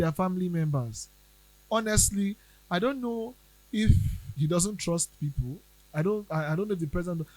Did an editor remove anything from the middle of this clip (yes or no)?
no